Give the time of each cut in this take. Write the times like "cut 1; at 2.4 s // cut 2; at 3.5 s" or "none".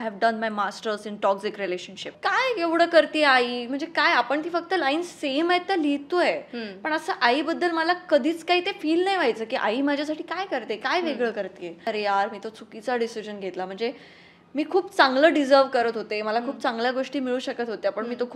cut 1; at 2.0 s // cut 2; at 11.8 s